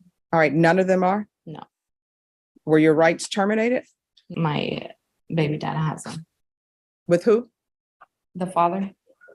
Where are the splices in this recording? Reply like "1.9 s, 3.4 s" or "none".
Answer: 4.3 s